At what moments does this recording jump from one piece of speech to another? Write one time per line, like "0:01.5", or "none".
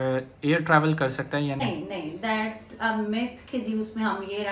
0:01.6